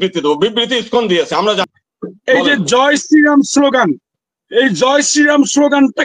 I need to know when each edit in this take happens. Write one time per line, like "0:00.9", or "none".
0:01.7